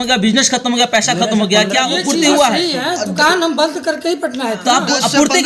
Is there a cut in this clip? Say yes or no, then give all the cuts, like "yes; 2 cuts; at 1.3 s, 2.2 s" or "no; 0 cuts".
no; 0 cuts